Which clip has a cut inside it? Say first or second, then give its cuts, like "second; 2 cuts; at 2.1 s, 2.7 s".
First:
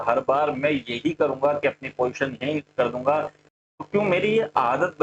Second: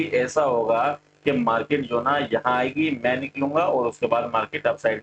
first; 1 cut; at 3.4 s